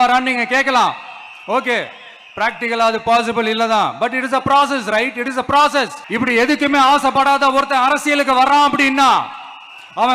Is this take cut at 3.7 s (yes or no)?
no